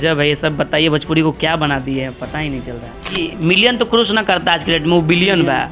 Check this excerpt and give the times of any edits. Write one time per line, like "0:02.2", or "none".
0:03.1